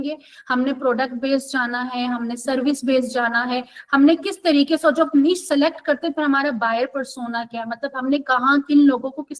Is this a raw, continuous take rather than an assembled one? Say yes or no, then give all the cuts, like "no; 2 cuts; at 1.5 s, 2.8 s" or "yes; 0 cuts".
yes; 0 cuts